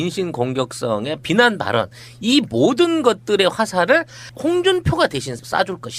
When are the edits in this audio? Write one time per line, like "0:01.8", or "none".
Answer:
0:02.1